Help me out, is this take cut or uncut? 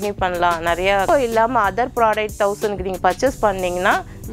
cut